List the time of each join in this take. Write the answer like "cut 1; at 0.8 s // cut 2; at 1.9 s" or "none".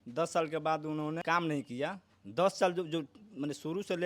cut 1; at 1.2 s